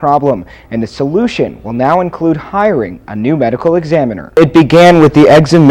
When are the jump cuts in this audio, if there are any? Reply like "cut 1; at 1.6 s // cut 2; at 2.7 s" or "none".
cut 1; at 4.4 s